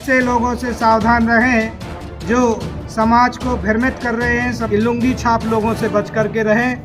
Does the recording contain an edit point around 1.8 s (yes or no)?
no